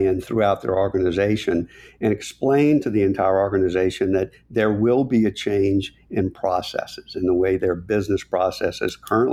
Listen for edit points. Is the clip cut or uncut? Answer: uncut